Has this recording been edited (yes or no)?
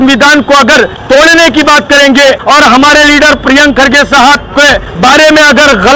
yes